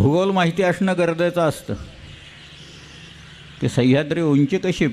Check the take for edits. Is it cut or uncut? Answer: uncut